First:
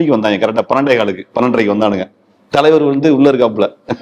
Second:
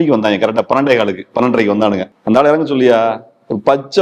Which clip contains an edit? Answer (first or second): second